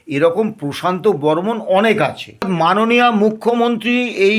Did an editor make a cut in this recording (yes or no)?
yes